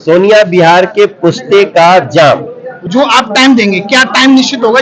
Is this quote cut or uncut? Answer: cut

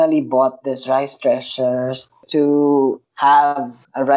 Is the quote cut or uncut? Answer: cut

